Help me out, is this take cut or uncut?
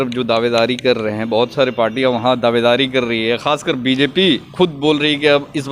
uncut